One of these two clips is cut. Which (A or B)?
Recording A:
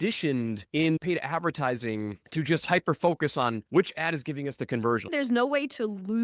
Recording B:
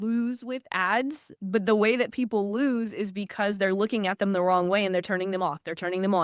A